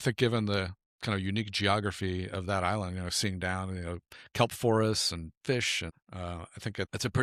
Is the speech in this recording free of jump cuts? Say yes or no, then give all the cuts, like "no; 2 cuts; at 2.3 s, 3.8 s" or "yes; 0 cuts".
yes; 0 cuts